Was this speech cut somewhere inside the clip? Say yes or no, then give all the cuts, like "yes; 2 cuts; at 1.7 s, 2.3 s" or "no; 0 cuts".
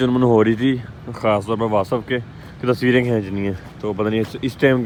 no; 0 cuts